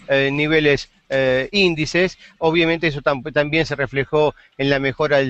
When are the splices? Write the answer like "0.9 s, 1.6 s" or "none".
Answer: none

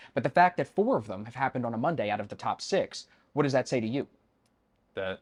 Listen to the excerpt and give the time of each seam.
none

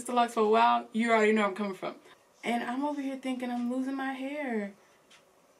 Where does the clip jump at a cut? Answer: 2.0 s

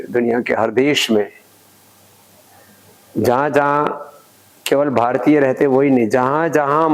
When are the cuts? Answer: none

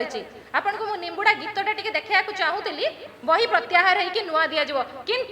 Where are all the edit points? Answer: 3.1 s

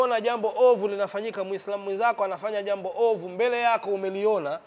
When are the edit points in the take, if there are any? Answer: none

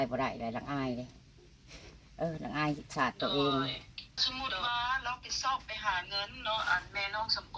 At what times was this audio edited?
4.3 s

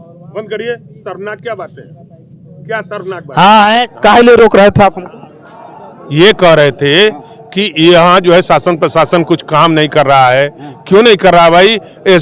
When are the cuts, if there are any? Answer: 3.8 s

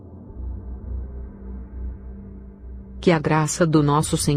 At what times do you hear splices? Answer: 3.0 s

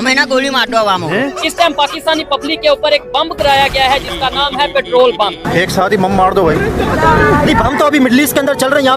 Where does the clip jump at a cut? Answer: 1.2 s, 5.4 s

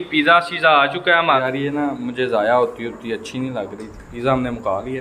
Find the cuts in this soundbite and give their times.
1.4 s

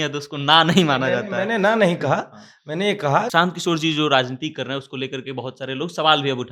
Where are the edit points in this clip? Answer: 3.3 s

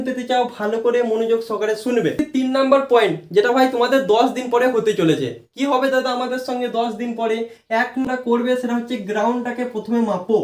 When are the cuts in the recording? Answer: 2.3 s, 8.1 s

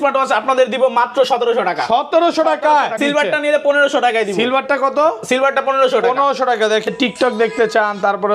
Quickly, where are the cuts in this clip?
3.0 s, 6.9 s

